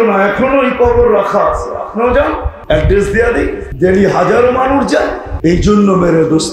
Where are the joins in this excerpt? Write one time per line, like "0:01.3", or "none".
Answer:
0:02.5
0:03.6
0:05.2